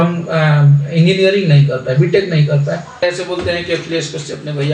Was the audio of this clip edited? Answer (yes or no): yes